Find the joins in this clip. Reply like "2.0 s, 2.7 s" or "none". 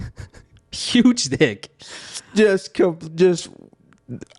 none

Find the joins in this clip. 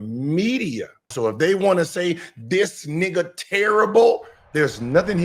1.1 s, 4.4 s

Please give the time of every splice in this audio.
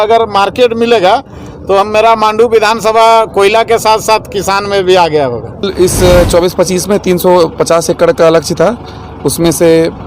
5.7 s

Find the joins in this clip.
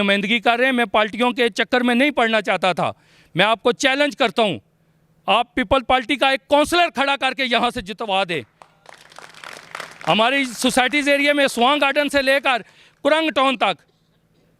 none

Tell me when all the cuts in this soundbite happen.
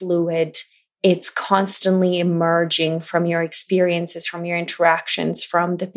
none

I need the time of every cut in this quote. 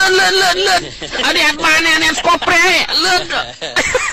3.0 s

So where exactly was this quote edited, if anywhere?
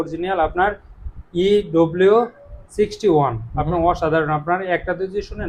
none

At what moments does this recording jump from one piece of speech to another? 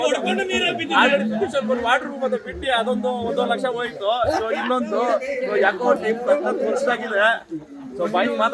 none

